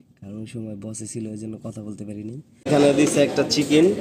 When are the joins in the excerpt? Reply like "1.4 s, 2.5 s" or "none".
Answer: 2.7 s

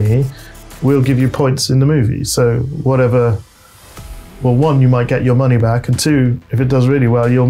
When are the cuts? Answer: none

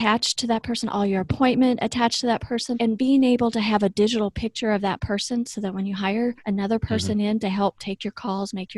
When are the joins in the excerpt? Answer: 2.8 s

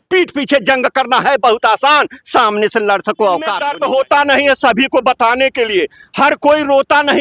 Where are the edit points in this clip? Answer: 3.7 s

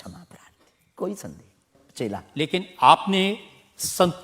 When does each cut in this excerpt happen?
1.7 s

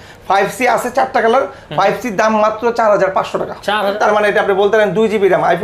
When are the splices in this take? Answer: 3.9 s

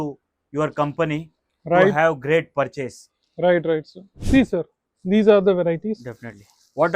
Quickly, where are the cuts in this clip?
4.1 s

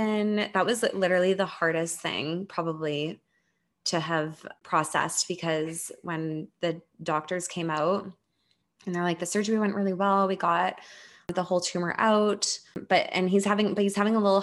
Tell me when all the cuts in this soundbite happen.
4.5 s, 11.3 s, 12.8 s

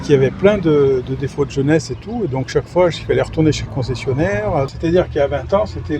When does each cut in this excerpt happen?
4.7 s

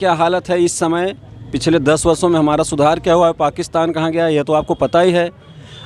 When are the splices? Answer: none

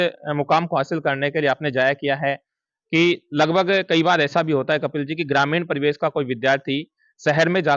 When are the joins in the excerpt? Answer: none

